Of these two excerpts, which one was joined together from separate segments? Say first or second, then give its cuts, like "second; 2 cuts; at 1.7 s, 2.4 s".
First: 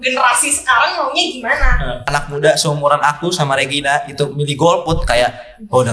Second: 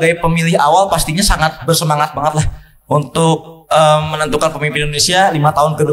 first; 1 cut; at 2.1 s